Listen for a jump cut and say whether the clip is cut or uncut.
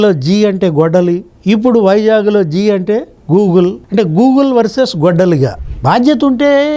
cut